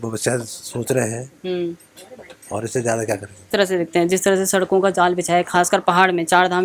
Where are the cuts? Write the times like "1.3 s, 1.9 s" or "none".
3.4 s